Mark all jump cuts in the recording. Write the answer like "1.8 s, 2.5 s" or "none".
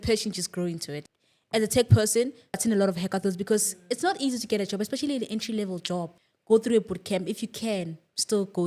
0.9 s, 2.6 s, 6.1 s